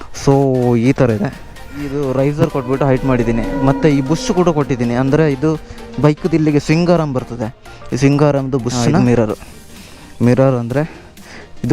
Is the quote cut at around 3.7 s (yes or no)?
no